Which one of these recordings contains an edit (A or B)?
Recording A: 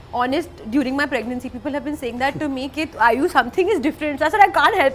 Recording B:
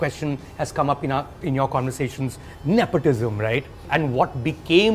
B